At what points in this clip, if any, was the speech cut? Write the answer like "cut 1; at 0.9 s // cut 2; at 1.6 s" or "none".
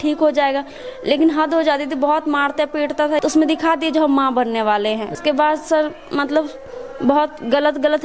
cut 1; at 3.2 s // cut 2; at 5.2 s